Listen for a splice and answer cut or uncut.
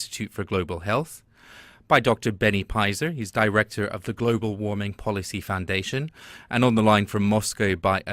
cut